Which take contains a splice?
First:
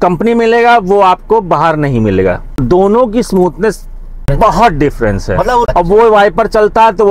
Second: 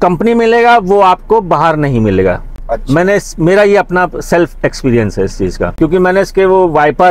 first; 3 cuts; at 2.5 s, 4.0 s, 5.6 s

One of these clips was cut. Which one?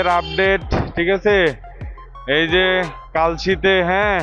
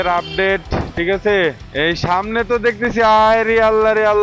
second; 1 cut; at 1.6 s

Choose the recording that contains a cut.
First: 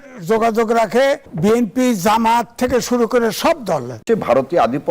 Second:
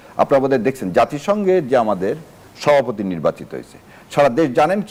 first; 2 cuts; at 1.3 s, 4.0 s

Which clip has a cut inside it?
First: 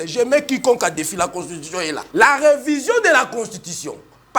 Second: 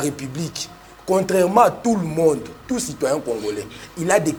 first; 1 cut; at 2.0 s

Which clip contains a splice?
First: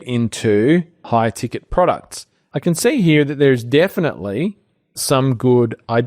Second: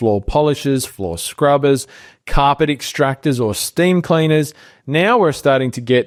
first; 3 cuts; at 1.0 s, 2.4 s, 5.0 s

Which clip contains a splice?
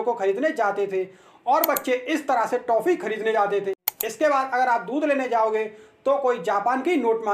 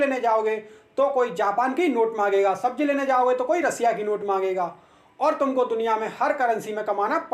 first; 1 cut; at 3.9 s

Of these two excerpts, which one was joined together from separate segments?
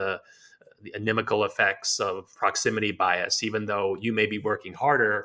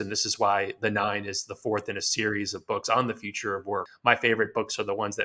second; 1 cut; at 3.9 s

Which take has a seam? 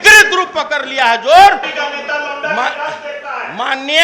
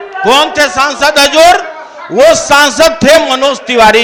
first; 1 cut; at 1.7 s

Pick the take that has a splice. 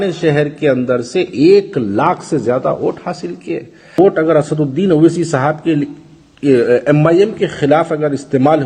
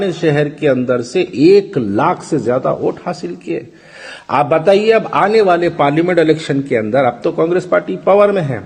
first; 1 cut; at 4.0 s

